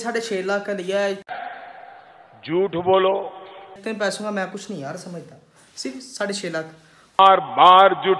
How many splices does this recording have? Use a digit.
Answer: 3